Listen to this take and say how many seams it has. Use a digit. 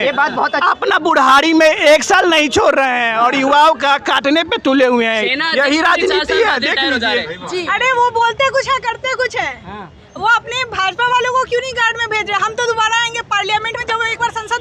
1